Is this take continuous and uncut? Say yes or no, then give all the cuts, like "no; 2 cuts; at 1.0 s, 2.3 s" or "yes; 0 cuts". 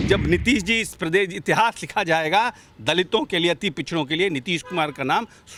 yes; 0 cuts